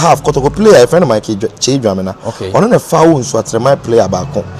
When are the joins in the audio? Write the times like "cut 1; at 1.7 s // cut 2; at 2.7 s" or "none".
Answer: none